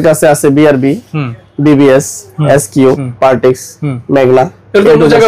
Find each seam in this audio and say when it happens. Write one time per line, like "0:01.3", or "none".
0:03.1